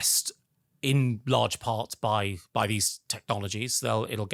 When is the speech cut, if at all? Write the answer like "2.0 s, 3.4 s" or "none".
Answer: none